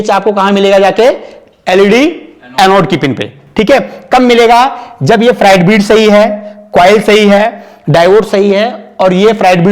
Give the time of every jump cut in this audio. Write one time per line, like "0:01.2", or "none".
none